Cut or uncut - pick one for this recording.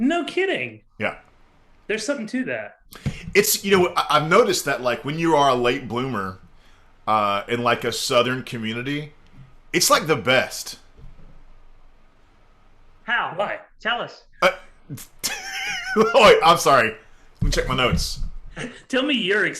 uncut